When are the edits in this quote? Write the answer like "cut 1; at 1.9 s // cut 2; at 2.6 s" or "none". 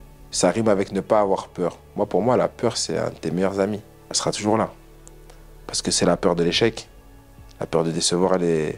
cut 1; at 4.2 s

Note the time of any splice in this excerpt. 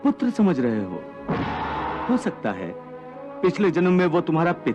cut 1; at 2.0 s

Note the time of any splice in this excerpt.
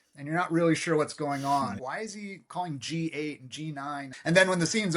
cut 1; at 1.8 s // cut 2; at 4.1 s

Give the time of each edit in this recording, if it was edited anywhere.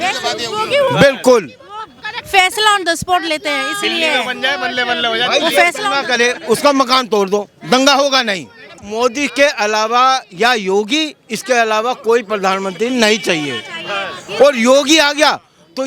cut 1; at 8.8 s

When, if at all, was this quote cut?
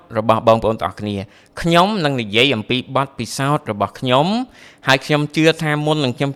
none

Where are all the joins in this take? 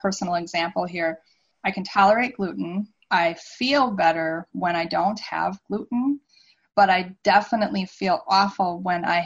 none

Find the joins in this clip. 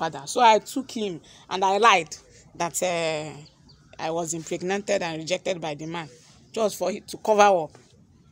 none

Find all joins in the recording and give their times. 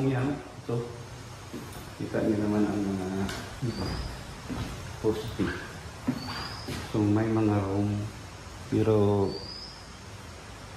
none

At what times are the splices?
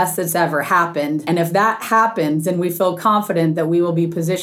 cut 1; at 1.2 s

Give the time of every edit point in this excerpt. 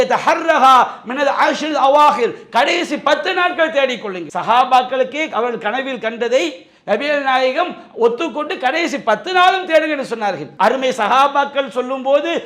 cut 1; at 4.2 s // cut 2; at 10.5 s

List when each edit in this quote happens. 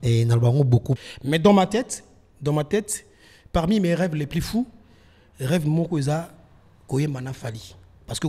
cut 1; at 1.0 s

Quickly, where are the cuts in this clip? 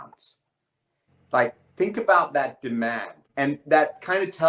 cut 1; at 3.1 s

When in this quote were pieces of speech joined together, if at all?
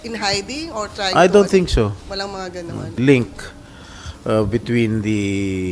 cut 1; at 2.9 s

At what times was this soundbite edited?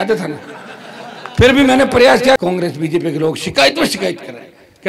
cut 1; at 2.4 s

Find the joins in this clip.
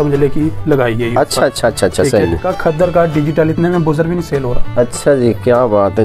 cut 1; at 2.5 s

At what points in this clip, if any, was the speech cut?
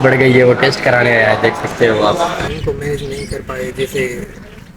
cut 1; at 2.5 s

